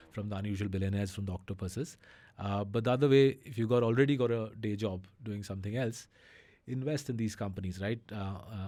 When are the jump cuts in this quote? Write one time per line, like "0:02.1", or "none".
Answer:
none